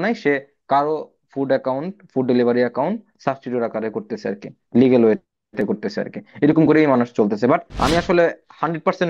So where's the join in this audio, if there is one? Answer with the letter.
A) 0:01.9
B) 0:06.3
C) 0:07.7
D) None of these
C